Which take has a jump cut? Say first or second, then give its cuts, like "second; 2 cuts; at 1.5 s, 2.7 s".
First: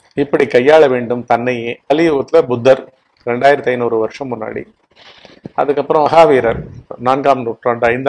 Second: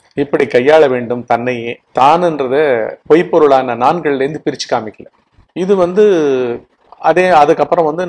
first; 2 cuts; at 1.8 s, 6.8 s